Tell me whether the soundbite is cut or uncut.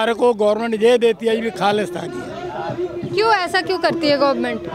uncut